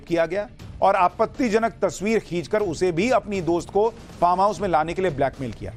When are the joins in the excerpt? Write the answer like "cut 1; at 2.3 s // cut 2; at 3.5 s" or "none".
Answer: none